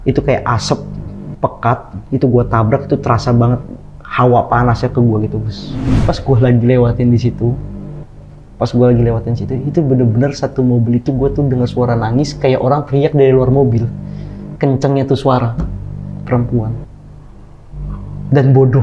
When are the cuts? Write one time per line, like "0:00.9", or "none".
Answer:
0:06.0